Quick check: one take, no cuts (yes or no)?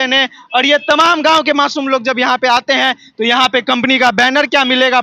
yes